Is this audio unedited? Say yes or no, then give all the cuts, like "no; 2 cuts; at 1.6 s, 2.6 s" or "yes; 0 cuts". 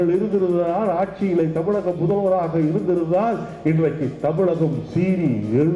yes; 0 cuts